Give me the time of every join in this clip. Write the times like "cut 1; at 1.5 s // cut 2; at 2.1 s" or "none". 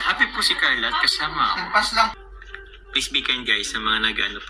cut 1; at 2.1 s

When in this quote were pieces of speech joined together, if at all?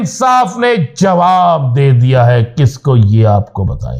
none

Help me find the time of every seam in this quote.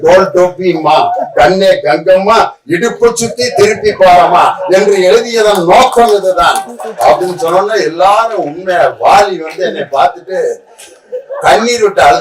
none

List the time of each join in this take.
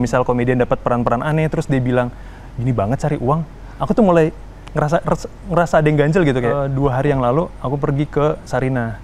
cut 1; at 6.6 s

